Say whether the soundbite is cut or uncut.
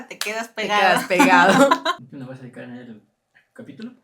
cut